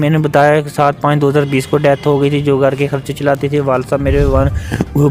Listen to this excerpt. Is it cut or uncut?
uncut